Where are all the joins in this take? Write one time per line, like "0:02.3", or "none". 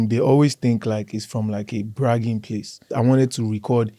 0:02.9